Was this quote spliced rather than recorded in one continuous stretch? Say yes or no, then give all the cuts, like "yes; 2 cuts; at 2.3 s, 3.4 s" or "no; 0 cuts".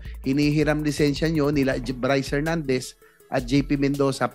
no; 0 cuts